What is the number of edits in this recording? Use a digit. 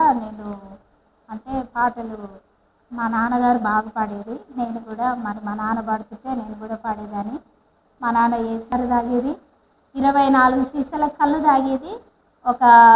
1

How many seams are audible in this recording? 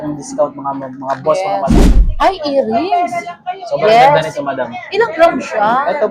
1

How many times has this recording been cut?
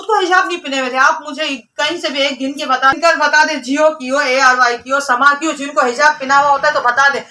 1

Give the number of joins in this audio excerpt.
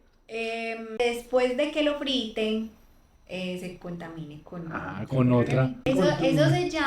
2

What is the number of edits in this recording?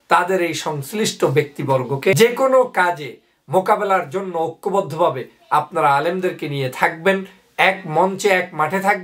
1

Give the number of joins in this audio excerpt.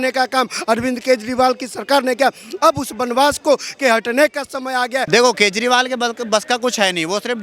1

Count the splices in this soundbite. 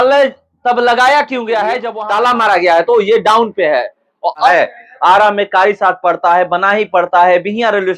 1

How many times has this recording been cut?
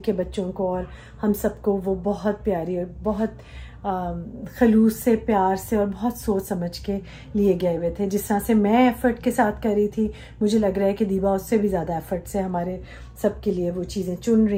0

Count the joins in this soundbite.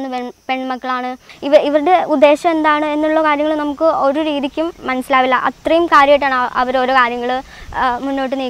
1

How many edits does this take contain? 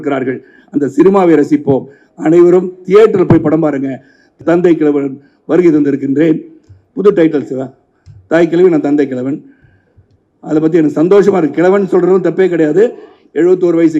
1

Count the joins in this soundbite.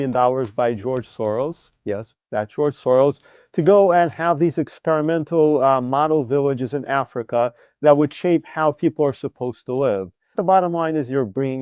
1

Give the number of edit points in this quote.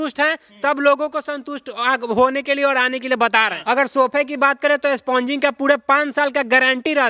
0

